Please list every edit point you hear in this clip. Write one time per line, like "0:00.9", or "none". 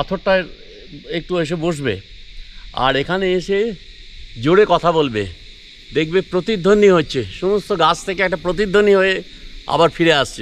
none